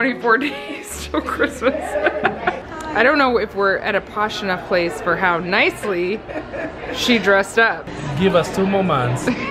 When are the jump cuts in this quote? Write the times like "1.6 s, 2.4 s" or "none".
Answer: 2.7 s, 8.0 s

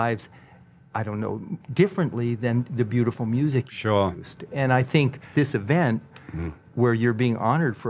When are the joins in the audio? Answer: 2.7 s

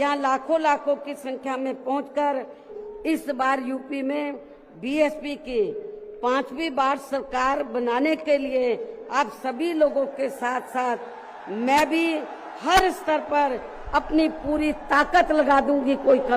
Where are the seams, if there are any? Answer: 2.7 s

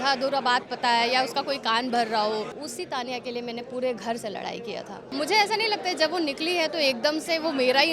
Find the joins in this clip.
2.6 s, 5.1 s

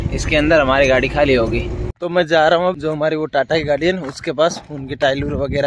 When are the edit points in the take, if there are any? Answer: 2.0 s, 2.8 s

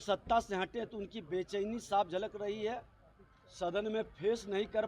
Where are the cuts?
none

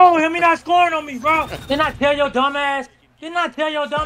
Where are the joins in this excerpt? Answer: 1.6 s

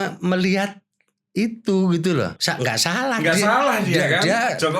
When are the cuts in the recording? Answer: 2.4 s

